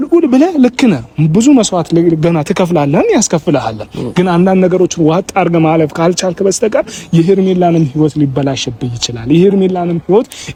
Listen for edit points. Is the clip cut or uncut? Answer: uncut